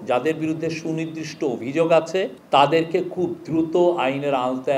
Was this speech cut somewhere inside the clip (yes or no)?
yes